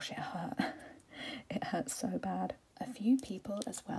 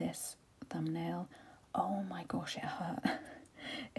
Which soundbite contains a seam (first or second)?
first